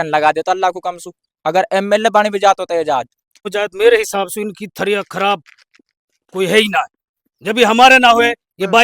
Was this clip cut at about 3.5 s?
yes; 1 cut; at 3.5 s

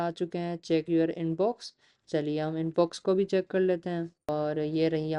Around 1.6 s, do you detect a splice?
no; 1 cut; at 4.3 s

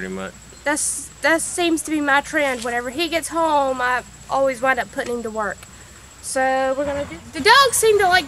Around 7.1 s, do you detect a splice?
yes; 1 cut; at 7.1 s

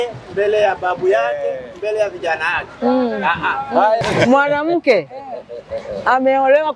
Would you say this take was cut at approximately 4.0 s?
yes; 1 cut; at 4.0 s

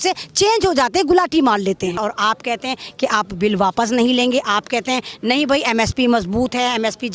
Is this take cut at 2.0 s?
yes; 1 cut; at 2.0 s

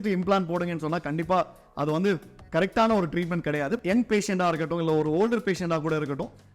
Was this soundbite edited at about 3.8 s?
yes; 1 cut; at 3.8 s

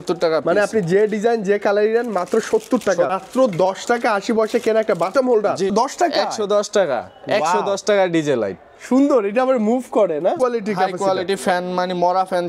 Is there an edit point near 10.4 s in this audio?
yes; 3 cuts; at 3.1 s, 5.7 s, 10.4 s

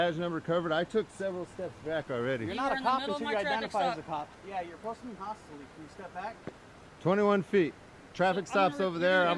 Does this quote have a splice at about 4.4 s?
yes; 1 cut; at 4.4 s

